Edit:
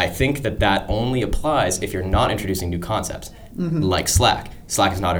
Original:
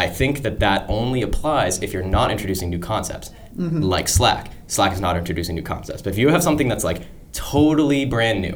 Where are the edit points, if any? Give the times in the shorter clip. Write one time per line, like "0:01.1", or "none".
none